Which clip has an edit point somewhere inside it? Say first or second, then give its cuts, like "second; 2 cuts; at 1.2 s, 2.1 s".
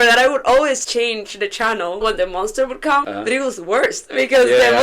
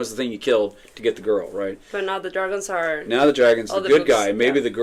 first; 3 cuts; at 0.8 s, 2.0 s, 3.1 s